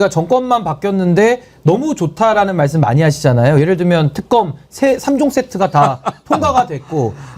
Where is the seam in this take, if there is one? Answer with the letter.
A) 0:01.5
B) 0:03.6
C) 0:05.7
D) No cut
D